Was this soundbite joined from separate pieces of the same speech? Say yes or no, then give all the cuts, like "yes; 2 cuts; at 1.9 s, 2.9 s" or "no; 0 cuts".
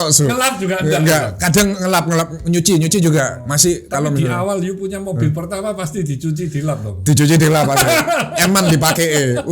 no; 0 cuts